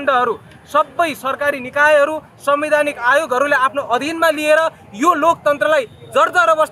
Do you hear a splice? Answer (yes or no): no